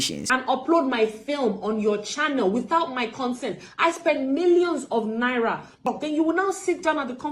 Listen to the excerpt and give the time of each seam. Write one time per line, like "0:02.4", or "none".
0:05.8